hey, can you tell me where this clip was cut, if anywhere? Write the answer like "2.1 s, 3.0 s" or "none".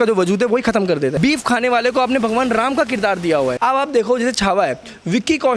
1.2 s, 3.6 s